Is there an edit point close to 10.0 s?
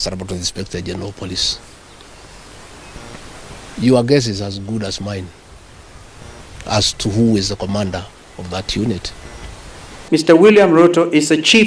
yes; 1 cut; at 10.0 s

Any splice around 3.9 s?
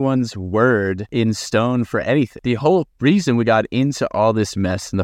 no; 2 cuts; at 1.0 s, 2.6 s

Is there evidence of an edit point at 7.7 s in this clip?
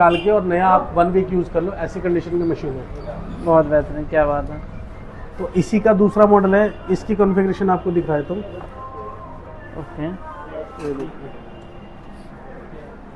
no; 0 cuts

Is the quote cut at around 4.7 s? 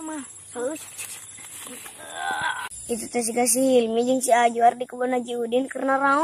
no; 1 cut; at 2.8 s

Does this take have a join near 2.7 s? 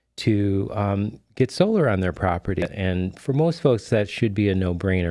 yes; 1 cut; at 2.7 s

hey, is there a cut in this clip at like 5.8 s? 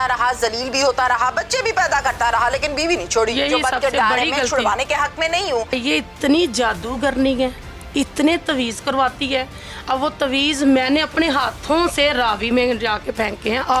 yes; 1 cut; at 5.8 s

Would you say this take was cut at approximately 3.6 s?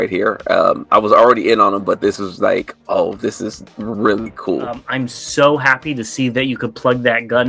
no; 1 cut; at 4.9 s

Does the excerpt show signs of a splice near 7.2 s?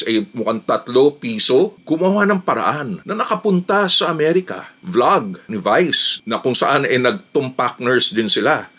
no; 2 cuts; at 1.8 s, 4.7 s

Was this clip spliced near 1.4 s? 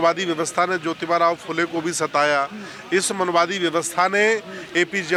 no; 0 cuts

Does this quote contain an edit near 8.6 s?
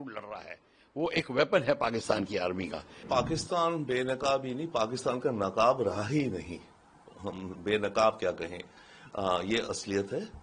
no; 1 cut; at 3.0 s

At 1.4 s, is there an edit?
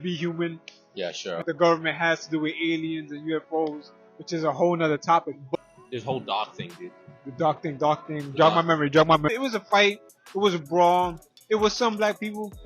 yes; 3 cuts; at 1.4 s, 5.5 s, 9.3 s

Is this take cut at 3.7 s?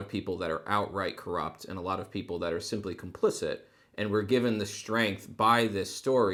no; 0 cuts

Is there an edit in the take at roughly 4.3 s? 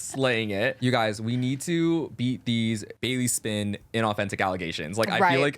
no; 2 cuts; at 0.8 s, 2.9 s

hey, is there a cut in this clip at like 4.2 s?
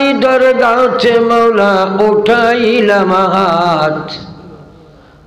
no; 0 cuts

